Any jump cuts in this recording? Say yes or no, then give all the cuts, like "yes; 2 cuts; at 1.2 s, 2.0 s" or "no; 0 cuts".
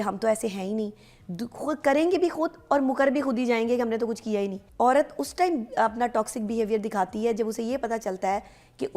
yes; 1 cut; at 4.6 s